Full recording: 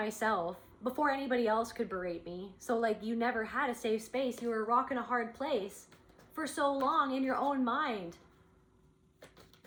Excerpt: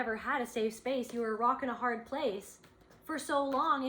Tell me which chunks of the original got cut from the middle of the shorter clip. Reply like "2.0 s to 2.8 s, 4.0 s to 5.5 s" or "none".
none